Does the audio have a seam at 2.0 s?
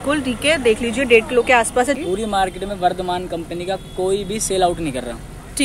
yes; 1 cut; at 2.0 s

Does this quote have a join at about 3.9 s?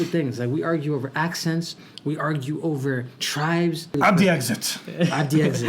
yes; 1 cut; at 3.9 s

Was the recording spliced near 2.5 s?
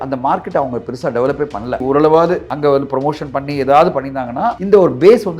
yes; 3 cuts; at 1.8 s, 2.5 s, 4.6 s

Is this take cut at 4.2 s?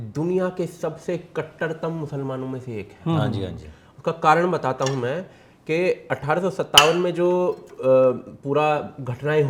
no; 0 cuts

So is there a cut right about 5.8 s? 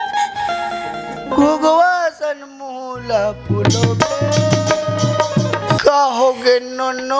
yes; 1 cut; at 5.8 s

